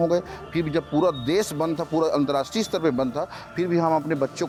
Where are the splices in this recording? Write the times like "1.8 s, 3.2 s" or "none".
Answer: none